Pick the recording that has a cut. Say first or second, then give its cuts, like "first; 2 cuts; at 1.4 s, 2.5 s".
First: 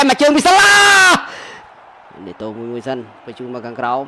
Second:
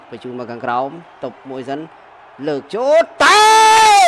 first; 1 cut; at 1.7 s